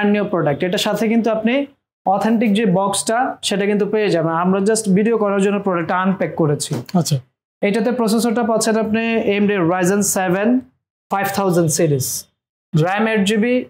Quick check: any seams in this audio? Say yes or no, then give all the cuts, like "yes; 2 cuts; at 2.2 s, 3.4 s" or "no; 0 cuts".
no; 0 cuts